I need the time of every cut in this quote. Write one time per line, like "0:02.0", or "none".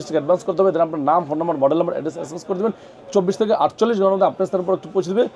none